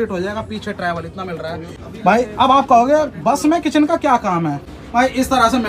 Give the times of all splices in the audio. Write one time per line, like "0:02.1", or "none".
0:01.8
0:04.6